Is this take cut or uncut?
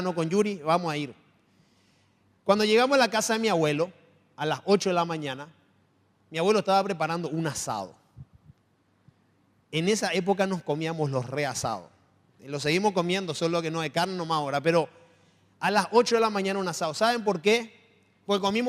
uncut